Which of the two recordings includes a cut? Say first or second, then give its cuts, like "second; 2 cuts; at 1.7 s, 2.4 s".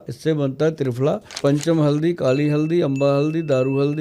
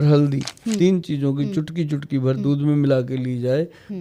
first; 1 cut; at 1.4 s